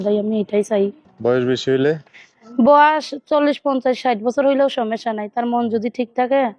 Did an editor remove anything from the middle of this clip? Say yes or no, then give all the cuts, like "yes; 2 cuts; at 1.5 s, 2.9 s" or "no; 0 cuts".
yes; 1 cut; at 1.1 s